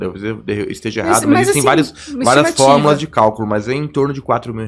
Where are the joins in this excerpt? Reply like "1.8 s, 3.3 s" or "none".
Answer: none

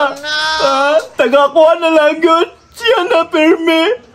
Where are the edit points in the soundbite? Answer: none

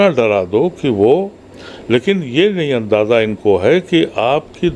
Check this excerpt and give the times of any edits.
none

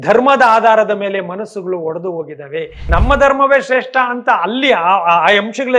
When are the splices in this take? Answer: 2.8 s

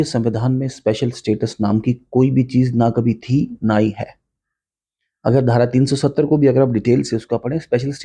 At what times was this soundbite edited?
none

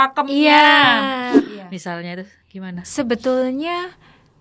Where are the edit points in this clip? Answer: 1.4 s

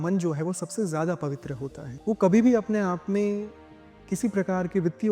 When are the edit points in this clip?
1.9 s

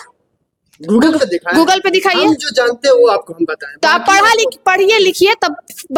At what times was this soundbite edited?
none

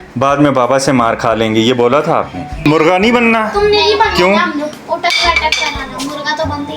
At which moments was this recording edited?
2.6 s

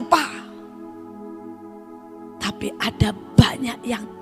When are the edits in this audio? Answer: none

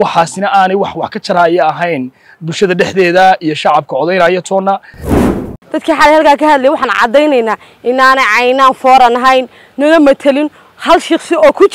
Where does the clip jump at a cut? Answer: 5.3 s

